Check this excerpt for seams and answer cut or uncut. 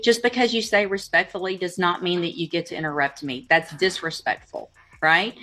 uncut